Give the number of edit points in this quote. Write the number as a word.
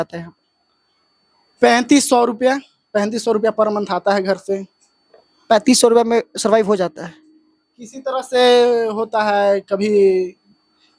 zero